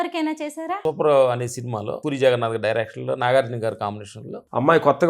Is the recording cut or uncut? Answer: cut